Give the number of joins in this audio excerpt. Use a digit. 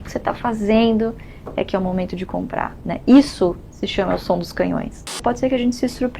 1